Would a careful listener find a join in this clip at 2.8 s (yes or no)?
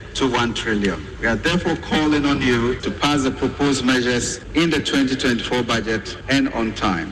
yes